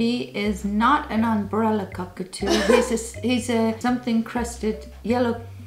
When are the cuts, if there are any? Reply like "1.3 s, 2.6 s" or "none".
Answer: 3.8 s

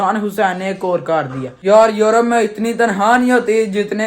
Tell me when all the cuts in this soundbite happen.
1.5 s

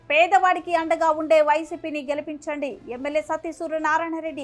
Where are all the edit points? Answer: none

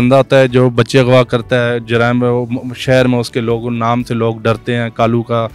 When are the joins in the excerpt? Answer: none

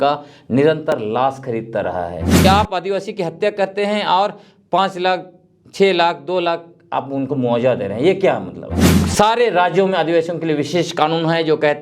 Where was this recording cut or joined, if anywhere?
2.4 s, 8.9 s

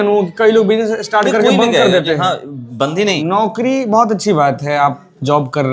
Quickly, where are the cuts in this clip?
3.2 s

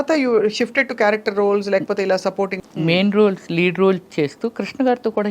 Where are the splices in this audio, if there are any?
2.6 s

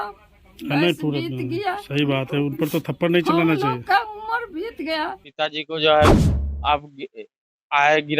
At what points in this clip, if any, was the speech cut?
5.2 s

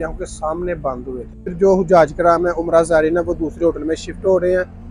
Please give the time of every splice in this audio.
1.5 s

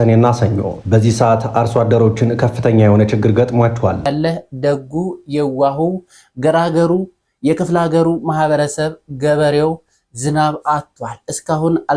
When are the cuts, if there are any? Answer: 4.1 s

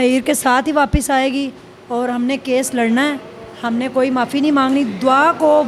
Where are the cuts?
none

